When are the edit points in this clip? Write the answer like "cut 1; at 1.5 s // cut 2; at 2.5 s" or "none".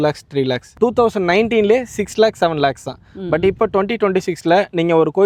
none